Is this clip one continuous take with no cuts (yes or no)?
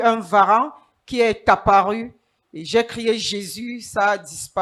yes